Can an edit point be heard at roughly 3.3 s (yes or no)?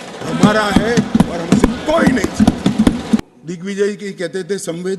no